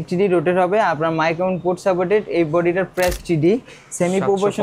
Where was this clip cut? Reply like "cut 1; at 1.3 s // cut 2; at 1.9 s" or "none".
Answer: cut 1; at 3.2 s